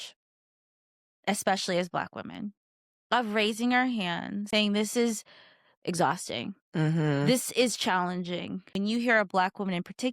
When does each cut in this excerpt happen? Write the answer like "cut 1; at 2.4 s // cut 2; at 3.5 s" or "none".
cut 1; at 4.5 s // cut 2; at 8.7 s